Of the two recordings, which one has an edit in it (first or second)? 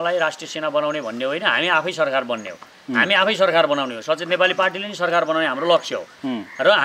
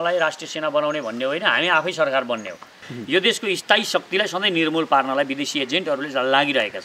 second